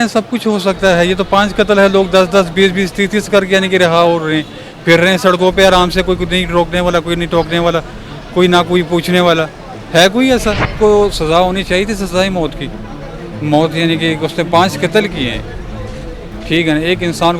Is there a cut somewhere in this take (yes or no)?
yes